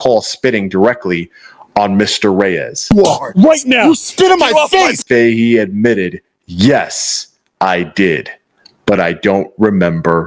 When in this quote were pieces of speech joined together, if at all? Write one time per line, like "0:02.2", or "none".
0:05.0